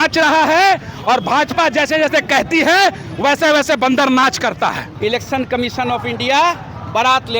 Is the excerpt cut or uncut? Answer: cut